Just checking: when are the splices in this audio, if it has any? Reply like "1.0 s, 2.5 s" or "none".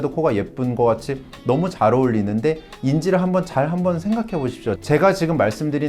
4.8 s